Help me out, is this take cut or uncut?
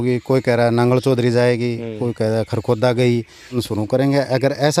cut